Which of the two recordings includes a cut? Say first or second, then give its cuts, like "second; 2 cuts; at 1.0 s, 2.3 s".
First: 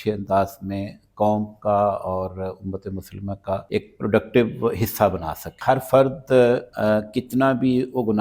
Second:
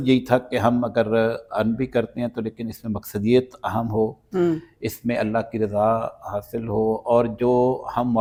first; 3 cuts; at 3.7 s, 5.5 s, 6.7 s